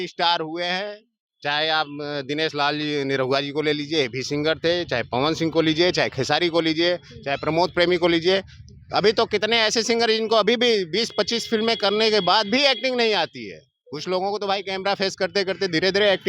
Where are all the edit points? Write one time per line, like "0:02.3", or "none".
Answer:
none